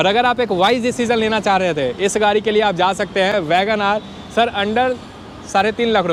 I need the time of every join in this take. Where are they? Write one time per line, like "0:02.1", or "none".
none